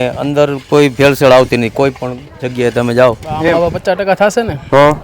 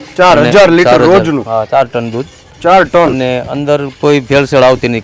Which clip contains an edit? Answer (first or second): first